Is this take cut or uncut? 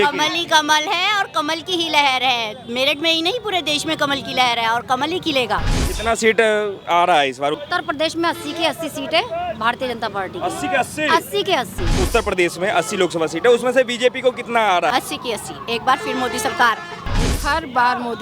cut